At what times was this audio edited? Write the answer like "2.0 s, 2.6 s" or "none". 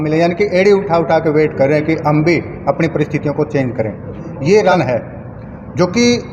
4.7 s